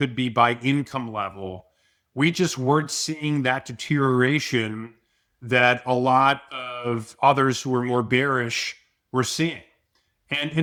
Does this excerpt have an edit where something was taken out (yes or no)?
no